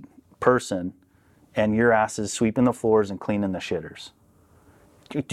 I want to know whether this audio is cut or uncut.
uncut